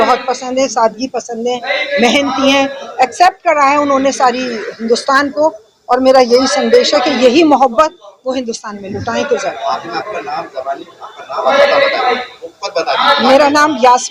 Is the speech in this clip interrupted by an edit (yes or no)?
no